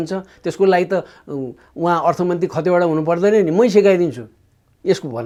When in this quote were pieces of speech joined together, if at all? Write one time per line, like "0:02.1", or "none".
none